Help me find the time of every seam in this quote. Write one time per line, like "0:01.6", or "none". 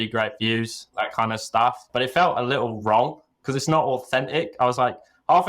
0:01.8